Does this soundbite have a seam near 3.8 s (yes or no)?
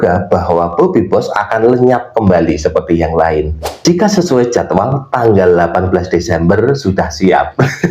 yes